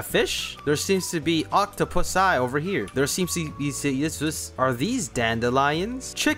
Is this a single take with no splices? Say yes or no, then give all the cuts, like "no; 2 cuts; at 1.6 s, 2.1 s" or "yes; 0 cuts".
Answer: no; 1 cut; at 4.6 s